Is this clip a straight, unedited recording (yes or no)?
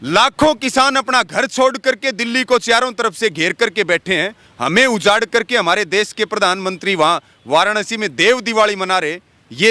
yes